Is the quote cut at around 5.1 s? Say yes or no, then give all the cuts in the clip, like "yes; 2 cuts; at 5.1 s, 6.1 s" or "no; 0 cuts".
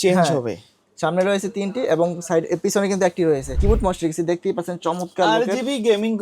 no; 1 cut; at 3.6 s